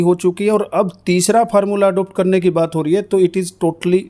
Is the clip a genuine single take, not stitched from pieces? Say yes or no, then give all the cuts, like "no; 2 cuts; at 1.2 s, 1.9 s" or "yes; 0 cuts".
yes; 0 cuts